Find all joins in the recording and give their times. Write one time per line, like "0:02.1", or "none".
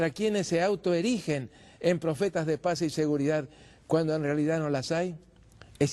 0:03.1